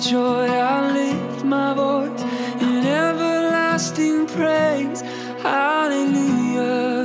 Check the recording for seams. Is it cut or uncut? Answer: uncut